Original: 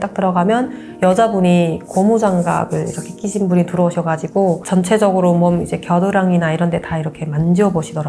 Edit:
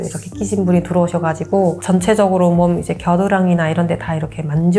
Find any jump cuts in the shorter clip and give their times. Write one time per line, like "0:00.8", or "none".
none